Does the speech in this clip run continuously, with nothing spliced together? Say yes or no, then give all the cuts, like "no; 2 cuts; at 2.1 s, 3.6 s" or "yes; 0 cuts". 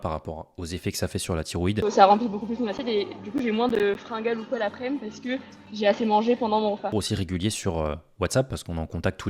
no; 2 cuts; at 1.8 s, 6.9 s